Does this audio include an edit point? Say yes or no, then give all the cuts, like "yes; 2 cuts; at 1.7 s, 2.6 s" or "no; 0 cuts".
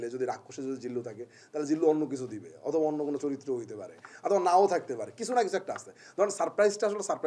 no; 0 cuts